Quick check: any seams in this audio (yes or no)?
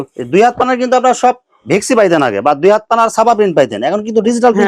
no